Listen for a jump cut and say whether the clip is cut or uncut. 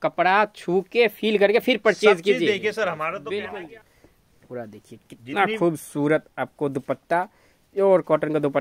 cut